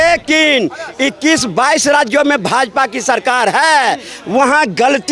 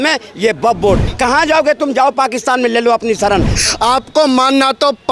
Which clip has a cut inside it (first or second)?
second